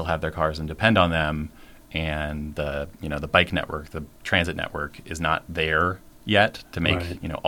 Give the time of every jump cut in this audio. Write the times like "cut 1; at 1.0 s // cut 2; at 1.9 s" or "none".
none